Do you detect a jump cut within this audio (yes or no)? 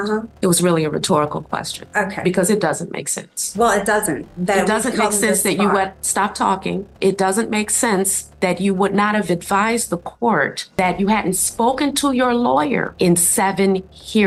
no